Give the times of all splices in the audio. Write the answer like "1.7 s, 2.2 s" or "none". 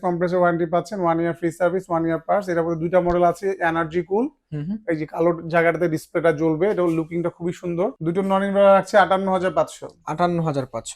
8.0 s